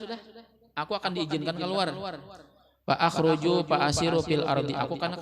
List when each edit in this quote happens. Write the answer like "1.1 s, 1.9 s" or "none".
none